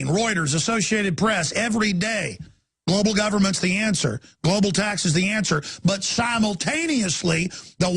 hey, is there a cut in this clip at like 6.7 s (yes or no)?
yes